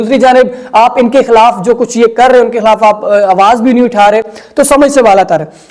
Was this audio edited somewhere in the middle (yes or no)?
no